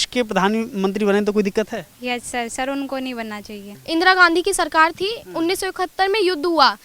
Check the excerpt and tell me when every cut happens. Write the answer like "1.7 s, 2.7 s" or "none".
3.7 s

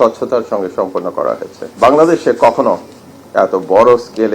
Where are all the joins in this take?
1.6 s

